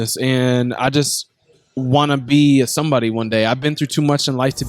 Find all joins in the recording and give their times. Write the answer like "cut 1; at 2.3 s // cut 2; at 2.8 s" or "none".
none